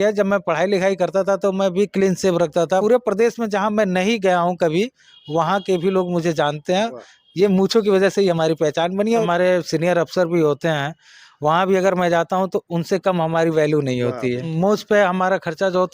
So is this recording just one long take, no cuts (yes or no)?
no